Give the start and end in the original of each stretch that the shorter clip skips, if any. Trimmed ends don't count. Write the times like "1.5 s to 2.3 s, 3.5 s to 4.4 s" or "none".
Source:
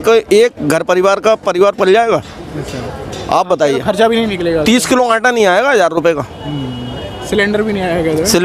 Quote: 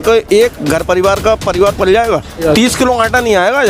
2.4 s to 4.5 s